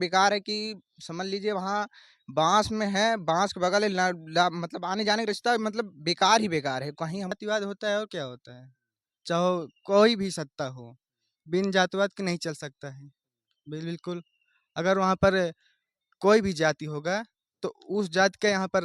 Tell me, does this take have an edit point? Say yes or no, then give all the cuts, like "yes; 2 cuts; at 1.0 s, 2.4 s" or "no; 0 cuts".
yes; 1 cut; at 7.4 s